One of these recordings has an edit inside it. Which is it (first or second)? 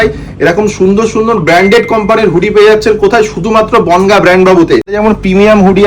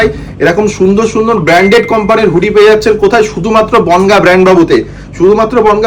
first